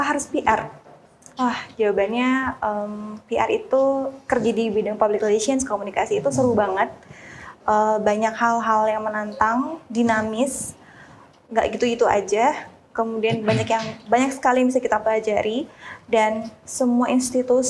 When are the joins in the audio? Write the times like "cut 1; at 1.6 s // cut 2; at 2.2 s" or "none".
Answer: none